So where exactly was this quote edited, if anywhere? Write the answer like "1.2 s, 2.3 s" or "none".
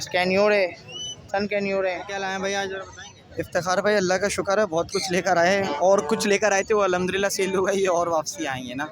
2.0 s